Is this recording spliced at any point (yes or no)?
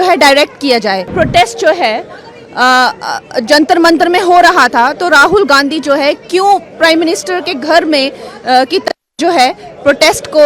yes